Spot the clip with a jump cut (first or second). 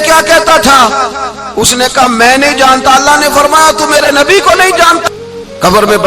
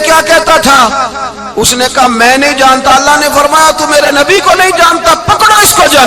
first